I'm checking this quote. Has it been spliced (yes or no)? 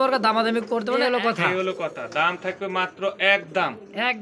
yes